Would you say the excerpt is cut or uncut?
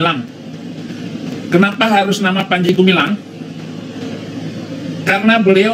uncut